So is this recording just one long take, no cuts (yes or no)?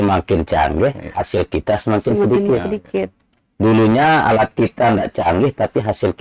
yes